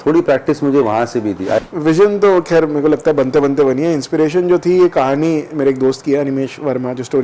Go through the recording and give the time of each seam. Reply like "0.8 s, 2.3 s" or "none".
1.6 s